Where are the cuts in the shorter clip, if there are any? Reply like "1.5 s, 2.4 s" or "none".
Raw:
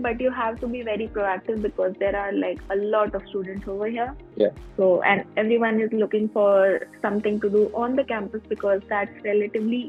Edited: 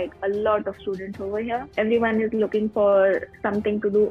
1.7 s